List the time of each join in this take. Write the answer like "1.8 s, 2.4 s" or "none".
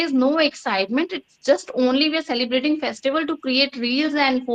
none